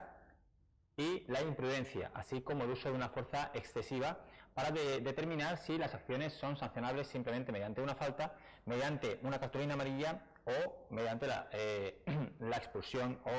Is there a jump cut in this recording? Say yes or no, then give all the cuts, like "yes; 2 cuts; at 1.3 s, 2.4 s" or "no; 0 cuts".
yes; 1 cut; at 1.1 s